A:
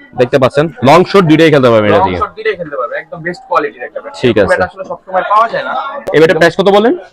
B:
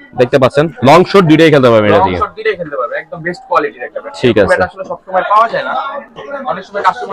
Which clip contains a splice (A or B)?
A